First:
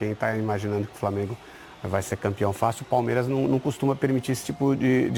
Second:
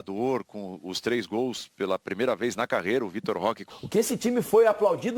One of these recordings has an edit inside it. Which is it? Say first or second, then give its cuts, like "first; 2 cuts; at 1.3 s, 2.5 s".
second; 1 cut; at 3.7 s